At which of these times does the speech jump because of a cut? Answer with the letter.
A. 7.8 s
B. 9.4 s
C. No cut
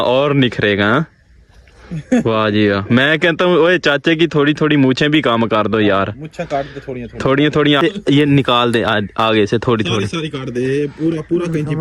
A